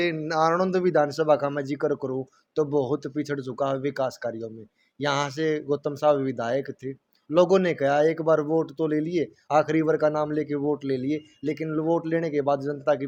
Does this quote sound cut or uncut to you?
uncut